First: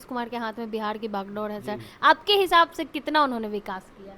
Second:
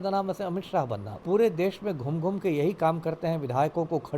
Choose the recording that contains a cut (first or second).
second